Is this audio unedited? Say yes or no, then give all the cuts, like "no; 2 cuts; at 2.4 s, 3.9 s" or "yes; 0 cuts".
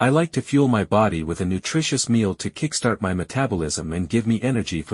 no; 1 cut; at 3.8 s